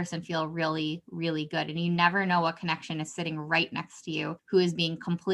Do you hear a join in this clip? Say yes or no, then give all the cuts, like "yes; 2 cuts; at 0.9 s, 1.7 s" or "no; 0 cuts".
yes; 1 cut; at 4.4 s